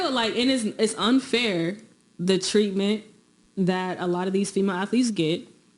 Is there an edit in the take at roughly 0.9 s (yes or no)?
no